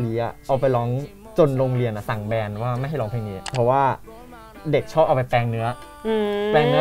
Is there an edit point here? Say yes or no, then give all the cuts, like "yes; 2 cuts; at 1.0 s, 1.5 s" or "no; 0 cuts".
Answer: yes; 1 cut; at 3.4 s